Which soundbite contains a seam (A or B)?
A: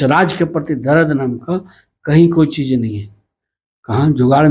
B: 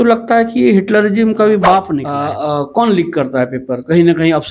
B